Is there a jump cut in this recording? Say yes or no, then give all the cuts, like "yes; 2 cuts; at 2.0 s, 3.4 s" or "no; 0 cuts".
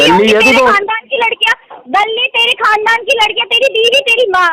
no; 0 cuts